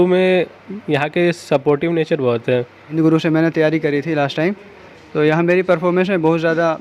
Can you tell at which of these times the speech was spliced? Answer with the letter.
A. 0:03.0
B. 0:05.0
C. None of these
A